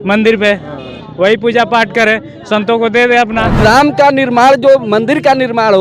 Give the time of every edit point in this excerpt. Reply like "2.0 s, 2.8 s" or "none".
3.6 s